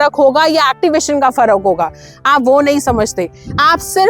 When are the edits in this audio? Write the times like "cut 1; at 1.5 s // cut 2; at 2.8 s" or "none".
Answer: none